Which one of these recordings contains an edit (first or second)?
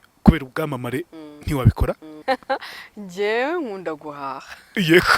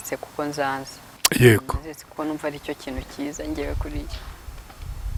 first